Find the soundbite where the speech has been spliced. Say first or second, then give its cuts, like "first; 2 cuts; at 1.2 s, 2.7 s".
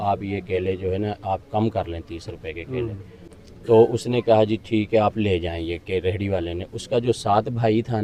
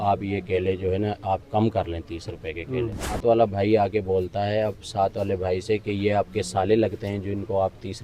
second; 1 cut; at 3.2 s